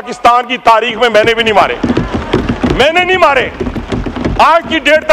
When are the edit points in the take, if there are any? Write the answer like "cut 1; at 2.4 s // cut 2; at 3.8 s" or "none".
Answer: none